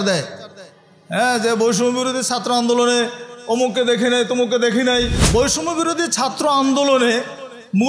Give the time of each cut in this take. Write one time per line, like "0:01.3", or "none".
0:05.2